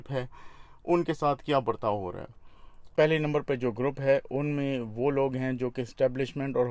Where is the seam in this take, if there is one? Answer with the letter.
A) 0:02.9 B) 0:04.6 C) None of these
A